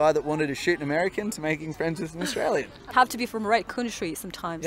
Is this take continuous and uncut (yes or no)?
yes